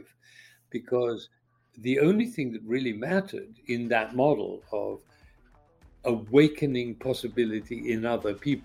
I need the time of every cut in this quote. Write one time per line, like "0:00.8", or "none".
none

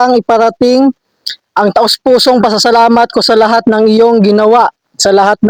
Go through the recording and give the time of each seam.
none

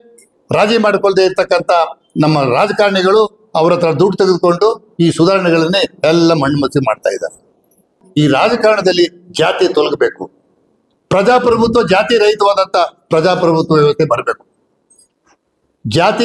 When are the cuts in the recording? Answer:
0:08.0

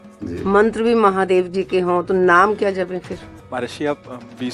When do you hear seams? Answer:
0:03.4

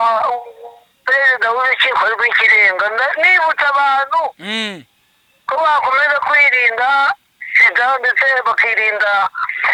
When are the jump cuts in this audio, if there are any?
none

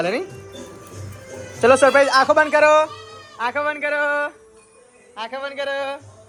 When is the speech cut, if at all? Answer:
none

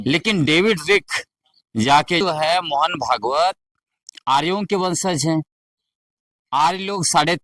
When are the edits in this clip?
0:02.2

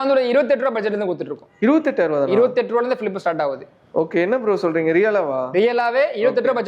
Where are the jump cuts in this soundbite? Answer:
none

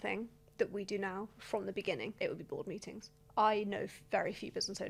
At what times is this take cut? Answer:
0:02.1
0:03.1

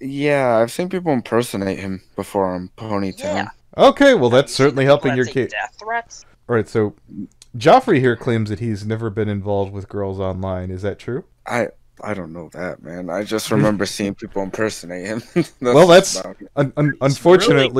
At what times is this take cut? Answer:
none

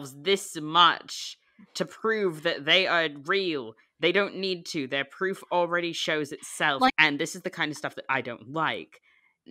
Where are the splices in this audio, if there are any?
0:06.9

